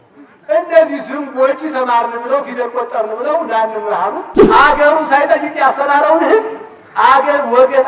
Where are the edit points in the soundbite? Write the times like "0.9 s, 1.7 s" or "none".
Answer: 4.4 s